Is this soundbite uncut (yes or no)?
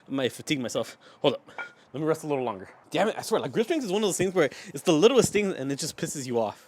no